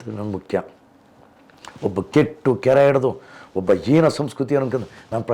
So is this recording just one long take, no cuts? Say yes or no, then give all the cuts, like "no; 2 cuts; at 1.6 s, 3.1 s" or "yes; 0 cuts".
yes; 0 cuts